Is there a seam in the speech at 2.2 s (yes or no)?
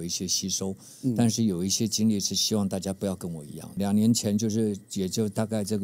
no